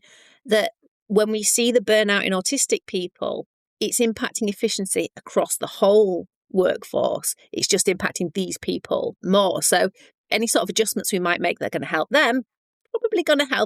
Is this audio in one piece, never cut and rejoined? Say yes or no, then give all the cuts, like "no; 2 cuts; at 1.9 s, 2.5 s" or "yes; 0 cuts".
no; 1 cut; at 9.2 s